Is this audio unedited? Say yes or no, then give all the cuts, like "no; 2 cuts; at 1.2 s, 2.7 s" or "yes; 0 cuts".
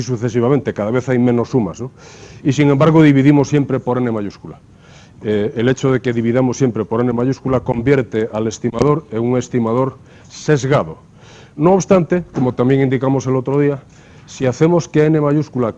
no; 1 cut; at 13.2 s